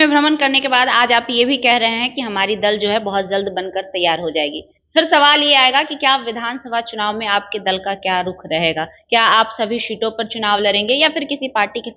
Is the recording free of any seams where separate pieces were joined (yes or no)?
yes